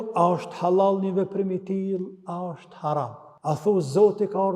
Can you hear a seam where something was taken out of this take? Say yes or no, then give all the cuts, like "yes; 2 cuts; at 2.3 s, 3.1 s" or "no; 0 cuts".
yes; 1 cut; at 3.2 s